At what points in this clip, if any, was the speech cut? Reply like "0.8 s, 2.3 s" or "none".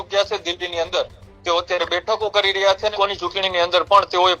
2.9 s